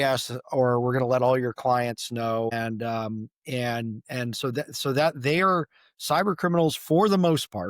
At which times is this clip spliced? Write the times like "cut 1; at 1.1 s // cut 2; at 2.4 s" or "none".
cut 1; at 2.5 s